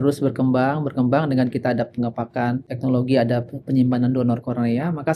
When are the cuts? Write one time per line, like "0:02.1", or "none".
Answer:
0:02.7